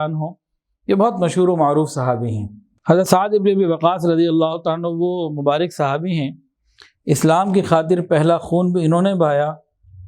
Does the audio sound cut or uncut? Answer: cut